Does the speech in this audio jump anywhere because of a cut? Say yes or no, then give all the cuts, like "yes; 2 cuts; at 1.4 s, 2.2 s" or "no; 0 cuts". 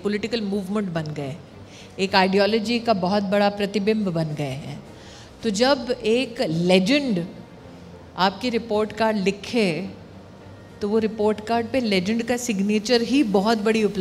no; 0 cuts